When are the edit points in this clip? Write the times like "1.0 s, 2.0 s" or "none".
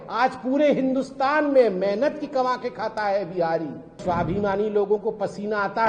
4.0 s